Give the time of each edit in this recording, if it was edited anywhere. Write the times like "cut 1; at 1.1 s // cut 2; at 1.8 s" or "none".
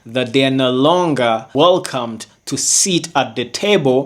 cut 1; at 1.5 s